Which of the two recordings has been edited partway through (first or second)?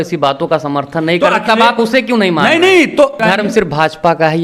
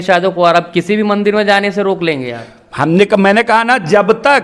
first